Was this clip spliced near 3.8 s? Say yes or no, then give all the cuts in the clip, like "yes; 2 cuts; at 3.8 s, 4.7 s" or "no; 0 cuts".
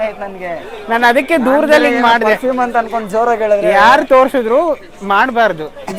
no; 0 cuts